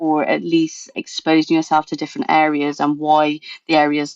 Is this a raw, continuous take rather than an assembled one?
no; 1 cut; at 0.9 s

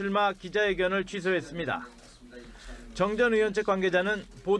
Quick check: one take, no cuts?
no; 1 cut; at 3.2 s

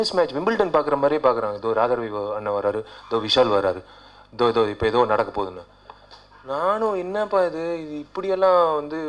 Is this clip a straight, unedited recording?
yes; 0 cuts

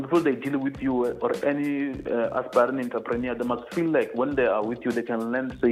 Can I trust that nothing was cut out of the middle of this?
yes; 0 cuts

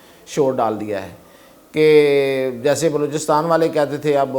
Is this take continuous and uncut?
yes; 0 cuts

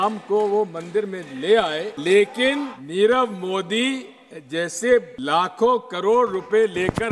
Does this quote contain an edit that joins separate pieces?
yes; 3 cuts; at 1.9 s, 2.8 s, 5.2 s

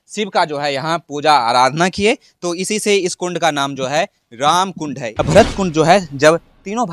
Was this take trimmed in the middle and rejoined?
yes; 1 cut; at 5.0 s

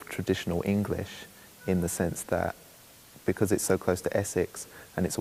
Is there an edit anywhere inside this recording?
no; 0 cuts

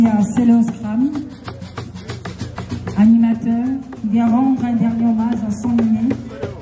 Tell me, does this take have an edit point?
no; 0 cuts

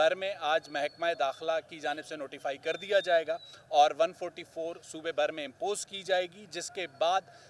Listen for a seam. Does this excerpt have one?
no; 0 cuts

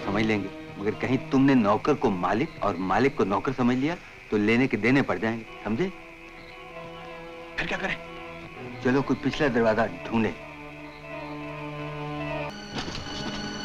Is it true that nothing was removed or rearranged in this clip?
no; 1 cut; at 12.5 s

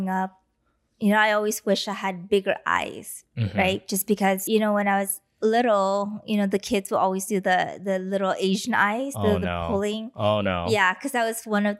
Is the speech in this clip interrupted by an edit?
yes; 1 cut; at 4.4 s

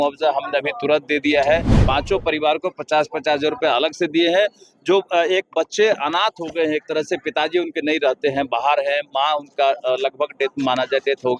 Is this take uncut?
no; 1 cut; at 1.8 s

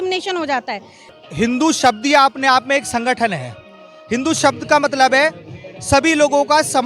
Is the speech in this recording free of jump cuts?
no; 1 cut; at 1.1 s

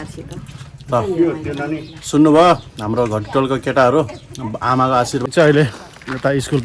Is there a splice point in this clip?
yes; 1 cut; at 5.3 s

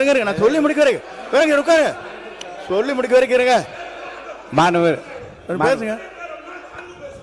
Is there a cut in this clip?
no; 0 cuts

